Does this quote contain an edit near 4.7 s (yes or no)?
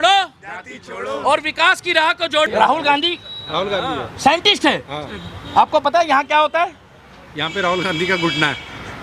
no